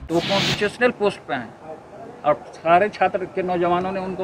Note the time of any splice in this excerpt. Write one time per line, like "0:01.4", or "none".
none